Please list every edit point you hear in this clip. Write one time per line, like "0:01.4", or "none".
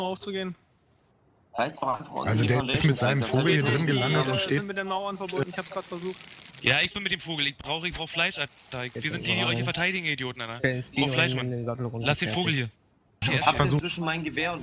0:13.2